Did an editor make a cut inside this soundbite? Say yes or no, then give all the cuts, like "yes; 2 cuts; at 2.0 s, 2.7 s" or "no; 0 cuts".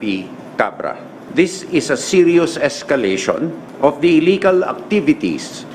yes; 2 cuts; at 1.2 s, 3.6 s